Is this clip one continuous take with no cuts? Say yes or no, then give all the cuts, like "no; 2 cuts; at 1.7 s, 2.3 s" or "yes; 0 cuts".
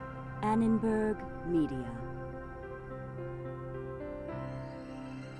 yes; 0 cuts